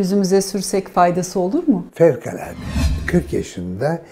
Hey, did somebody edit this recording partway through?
yes; 1 cut; at 3.0 s

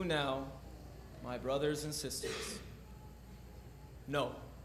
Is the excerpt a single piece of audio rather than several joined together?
yes; 0 cuts

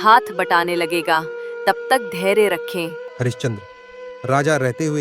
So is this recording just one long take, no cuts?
no; 1 cut; at 3.1 s

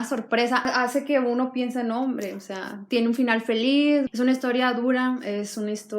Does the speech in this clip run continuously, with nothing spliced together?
no; 1 cut; at 4.1 s

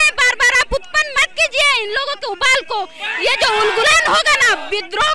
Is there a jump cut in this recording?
no; 0 cuts

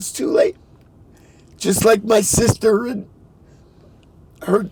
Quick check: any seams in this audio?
no; 0 cuts

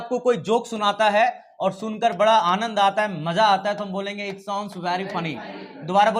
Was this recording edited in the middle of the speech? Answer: no; 0 cuts

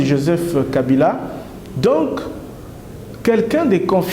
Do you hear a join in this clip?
no; 0 cuts

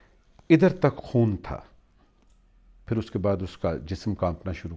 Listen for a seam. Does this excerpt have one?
yes; 1 cut; at 2.8 s

